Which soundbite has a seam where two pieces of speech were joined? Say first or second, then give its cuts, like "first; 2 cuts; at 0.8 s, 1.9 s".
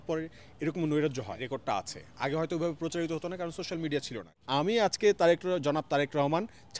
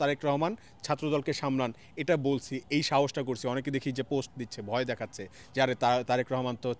first; 2 cuts; at 1.4 s, 4.4 s